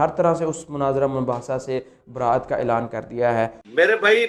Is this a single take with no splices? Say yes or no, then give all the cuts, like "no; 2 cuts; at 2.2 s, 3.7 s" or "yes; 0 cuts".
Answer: yes; 0 cuts